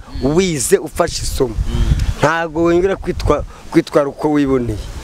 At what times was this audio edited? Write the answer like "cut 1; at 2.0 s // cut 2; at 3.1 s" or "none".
none